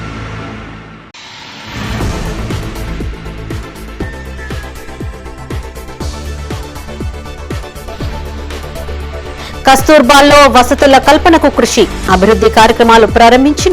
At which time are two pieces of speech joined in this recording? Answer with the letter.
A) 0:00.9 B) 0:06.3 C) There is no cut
A